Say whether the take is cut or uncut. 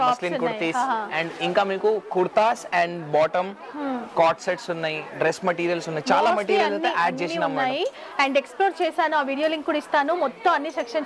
uncut